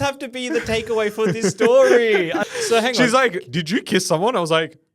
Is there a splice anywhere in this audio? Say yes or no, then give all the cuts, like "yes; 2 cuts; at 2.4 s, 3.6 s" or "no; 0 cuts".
yes; 1 cut; at 2.4 s